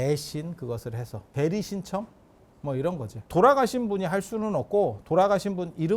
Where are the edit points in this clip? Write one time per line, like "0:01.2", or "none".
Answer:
0:01.3
0:03.3